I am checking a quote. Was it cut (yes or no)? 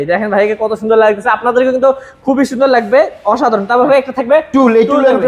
no